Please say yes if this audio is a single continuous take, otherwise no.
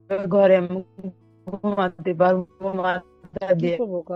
yes